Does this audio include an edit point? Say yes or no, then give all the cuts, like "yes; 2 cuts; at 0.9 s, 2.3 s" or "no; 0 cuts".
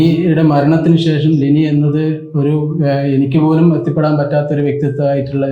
no; 0 cuts